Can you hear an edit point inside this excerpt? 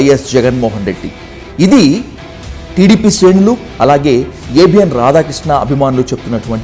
no; 0 cuts

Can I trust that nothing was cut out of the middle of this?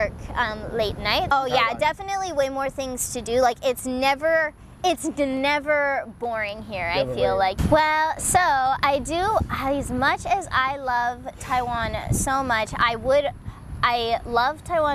no; 2 cuts; at 1.3 s, 7.6 s

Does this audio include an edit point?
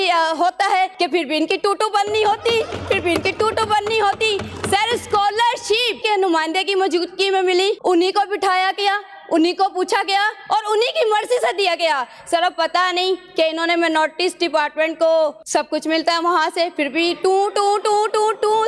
yes; 4 cuts; at 0.9 s, 6.0 s, 7.8 s, 15.4 s

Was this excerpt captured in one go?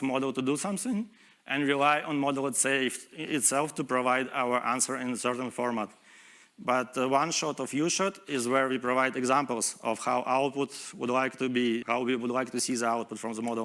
no; 1 cut; at 11.8 s

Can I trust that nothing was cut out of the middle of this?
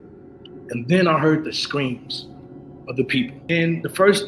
no; 1 cut; at 3.4 s

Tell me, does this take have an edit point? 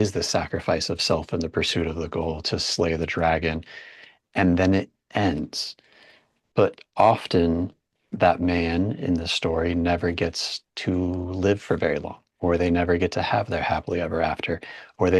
no; 0 cuts

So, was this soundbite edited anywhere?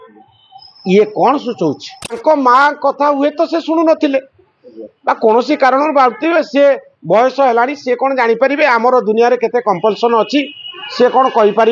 yes; 1 cut; at 2.2 s

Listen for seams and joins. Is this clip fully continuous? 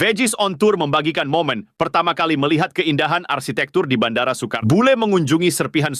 no; 1 cut; at 4.6 s

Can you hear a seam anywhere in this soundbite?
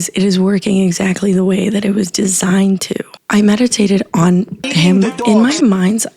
yes; 2 cuts; at 3.2 s, 5.2 s

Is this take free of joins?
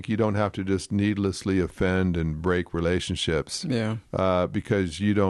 yes; 0 cuts

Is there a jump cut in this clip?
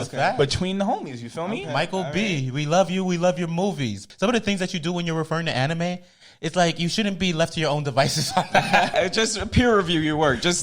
yes; 2 cuts; at 4.0 s, 8.9 s

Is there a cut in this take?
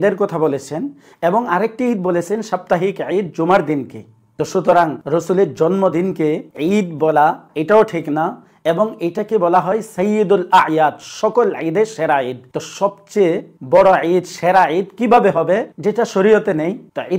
no; 0 cuts

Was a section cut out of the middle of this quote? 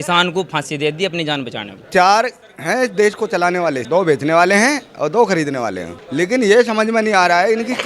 yes; 3 cuts; at 1.8 s, 3.8 s, 6.0 s

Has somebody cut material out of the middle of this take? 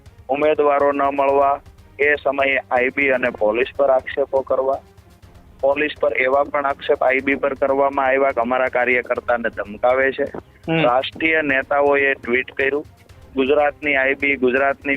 no; 0 cuts

